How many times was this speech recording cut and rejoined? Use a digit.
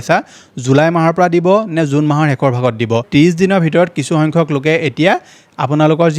1